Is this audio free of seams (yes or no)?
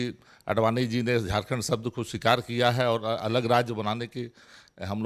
yes